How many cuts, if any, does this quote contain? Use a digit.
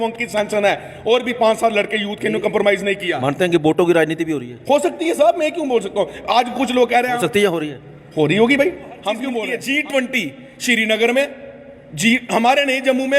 1